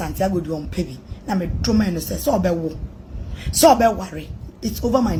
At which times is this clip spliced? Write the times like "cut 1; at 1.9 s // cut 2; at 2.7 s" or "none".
none